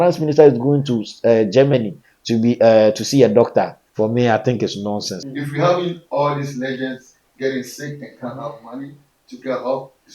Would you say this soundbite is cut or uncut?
cut